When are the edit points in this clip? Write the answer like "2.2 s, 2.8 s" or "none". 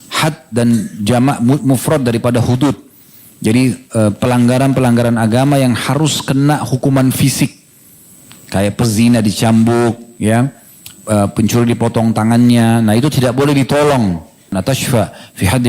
14.5 s